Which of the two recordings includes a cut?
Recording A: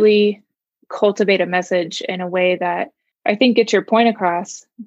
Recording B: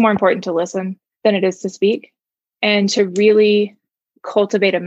B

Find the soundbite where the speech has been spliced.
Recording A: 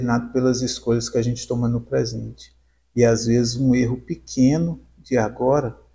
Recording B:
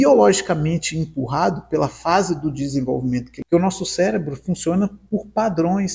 B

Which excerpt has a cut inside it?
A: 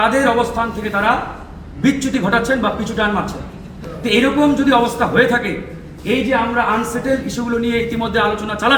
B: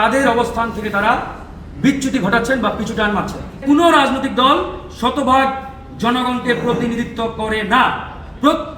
B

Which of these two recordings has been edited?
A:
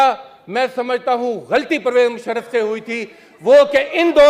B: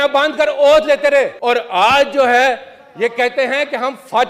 B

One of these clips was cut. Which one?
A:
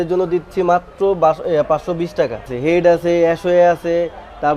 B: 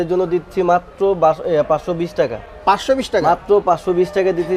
A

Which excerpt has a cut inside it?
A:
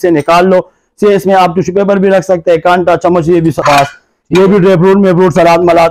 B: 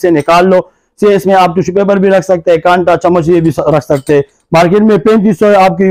A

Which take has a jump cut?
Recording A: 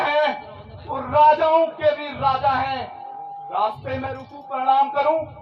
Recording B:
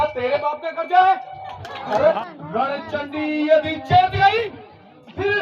B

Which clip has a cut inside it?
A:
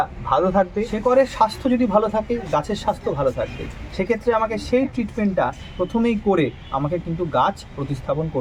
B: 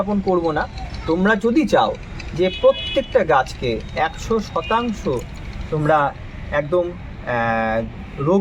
A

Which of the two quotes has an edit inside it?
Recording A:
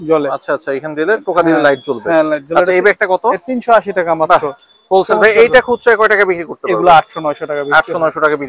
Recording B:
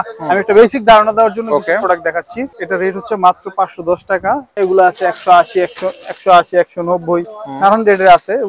B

